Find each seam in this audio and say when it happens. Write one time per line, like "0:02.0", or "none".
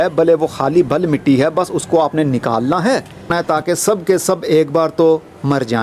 0:03.3